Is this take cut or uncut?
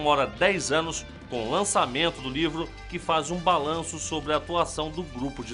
uncut